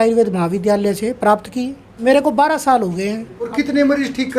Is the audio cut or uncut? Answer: cut